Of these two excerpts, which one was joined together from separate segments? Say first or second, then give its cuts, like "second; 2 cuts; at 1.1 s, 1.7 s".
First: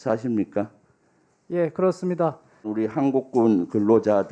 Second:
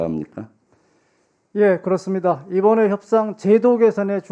first; 1 cut; at 2.7 s